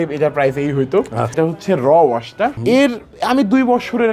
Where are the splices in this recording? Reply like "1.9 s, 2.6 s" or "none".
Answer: 1.3 s, 2.6 s